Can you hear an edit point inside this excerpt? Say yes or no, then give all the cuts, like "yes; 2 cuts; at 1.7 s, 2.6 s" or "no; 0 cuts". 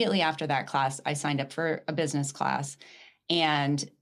no; 0 cuts